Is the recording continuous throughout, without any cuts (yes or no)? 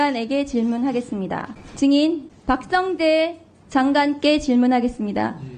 no